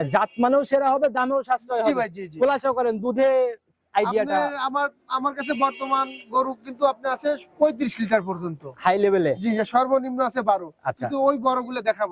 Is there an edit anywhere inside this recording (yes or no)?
no